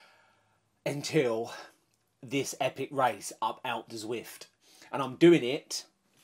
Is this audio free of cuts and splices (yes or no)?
no